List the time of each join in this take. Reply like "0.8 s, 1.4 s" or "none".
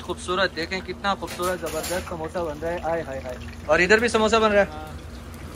none